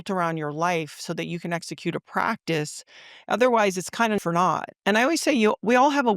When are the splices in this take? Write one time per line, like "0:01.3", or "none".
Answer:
0:04.2